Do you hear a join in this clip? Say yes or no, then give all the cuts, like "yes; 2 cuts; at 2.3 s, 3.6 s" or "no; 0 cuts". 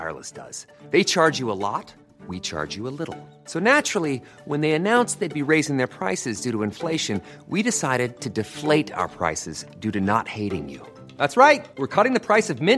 no; 0 cuts